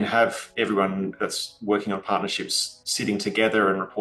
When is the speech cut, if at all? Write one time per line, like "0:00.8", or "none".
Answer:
none